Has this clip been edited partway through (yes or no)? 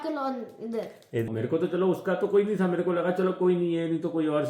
yes